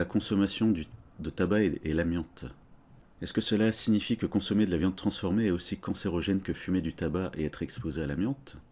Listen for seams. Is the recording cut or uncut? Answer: uncut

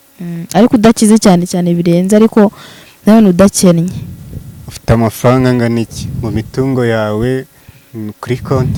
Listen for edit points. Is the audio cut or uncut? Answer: uncut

